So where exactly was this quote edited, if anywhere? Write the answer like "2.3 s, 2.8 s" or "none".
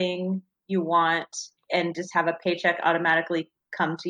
1.6 s